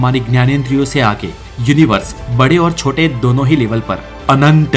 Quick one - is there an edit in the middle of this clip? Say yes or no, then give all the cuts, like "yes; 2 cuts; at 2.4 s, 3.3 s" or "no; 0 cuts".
no; 0 cuts